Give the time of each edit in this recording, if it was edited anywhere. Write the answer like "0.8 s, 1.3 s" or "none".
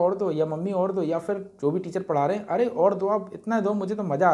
none